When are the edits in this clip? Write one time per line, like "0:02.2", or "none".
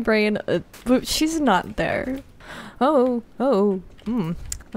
0:02.4

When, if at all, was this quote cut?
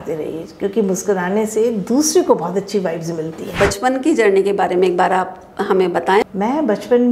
0:03.6
0:06.2

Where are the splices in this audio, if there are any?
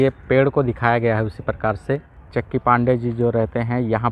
0:02.2

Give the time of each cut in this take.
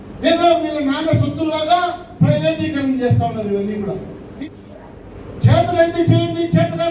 0:04.2

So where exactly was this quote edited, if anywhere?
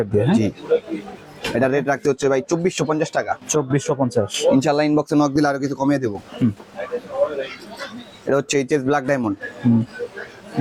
none

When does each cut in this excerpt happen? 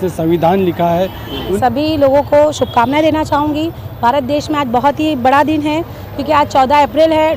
0:01.5

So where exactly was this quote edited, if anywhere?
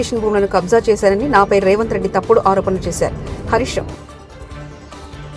none

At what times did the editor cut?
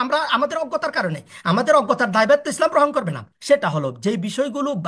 0:03.3

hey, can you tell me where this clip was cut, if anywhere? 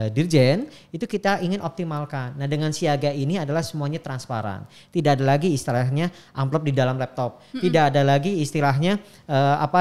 none

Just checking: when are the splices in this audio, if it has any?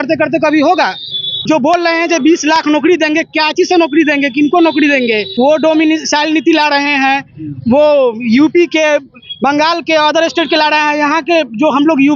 0:01.4
0:05.3

